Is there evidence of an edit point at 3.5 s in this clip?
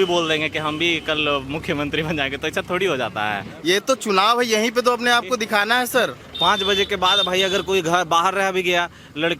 yes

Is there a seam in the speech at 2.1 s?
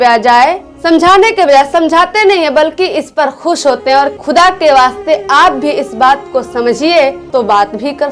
no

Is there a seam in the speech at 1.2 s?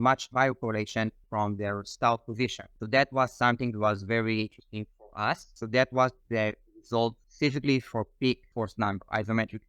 yes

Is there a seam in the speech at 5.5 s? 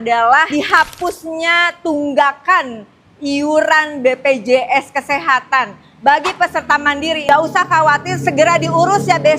no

